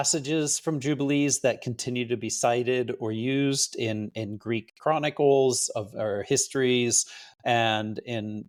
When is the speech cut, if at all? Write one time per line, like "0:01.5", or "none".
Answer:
none